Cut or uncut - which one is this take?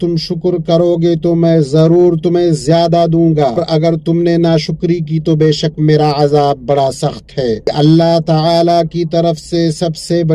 cut